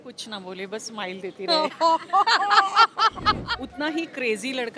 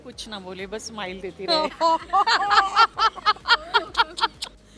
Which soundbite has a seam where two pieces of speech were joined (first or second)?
first